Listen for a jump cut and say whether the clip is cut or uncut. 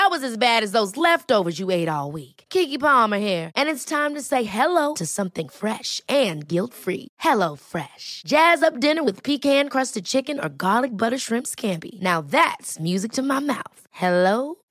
uncut